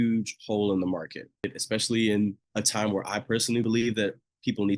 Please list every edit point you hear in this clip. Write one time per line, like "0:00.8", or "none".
0:01.6
0:02.4
0:03.6